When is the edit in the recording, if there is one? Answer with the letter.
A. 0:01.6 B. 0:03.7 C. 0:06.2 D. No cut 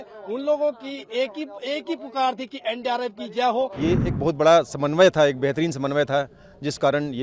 B